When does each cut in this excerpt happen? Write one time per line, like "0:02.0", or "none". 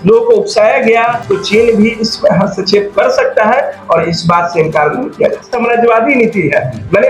0:01.2
0:05.5